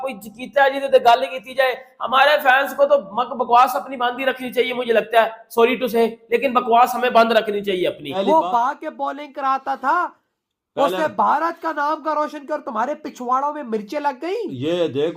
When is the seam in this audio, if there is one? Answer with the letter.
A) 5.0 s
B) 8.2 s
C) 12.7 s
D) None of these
B